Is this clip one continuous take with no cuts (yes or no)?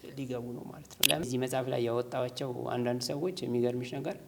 no